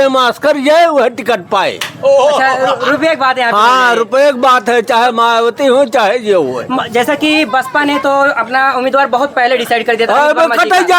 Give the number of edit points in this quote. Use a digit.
0